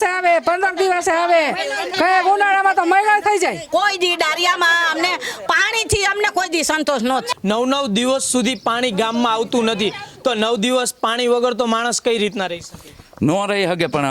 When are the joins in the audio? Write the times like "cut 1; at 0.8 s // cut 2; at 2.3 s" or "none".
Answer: cut 1; at 3.6 s // cut 2; at 7.3 s